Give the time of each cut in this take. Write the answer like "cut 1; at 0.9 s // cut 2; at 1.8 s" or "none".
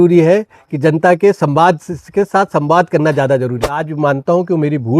cut 1; at 3.9 s